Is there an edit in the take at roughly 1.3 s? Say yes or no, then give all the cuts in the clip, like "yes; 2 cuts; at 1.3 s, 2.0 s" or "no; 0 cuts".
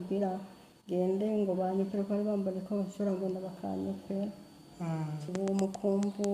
no; 1 cut; at 5.3 s